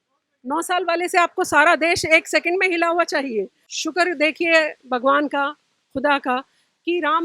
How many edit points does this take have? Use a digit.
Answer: 1